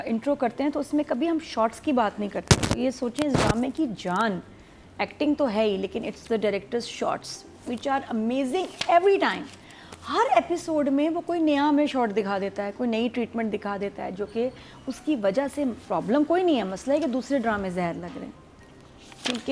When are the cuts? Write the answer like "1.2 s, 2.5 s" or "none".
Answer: none